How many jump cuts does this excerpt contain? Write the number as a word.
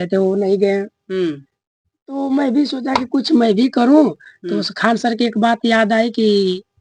zero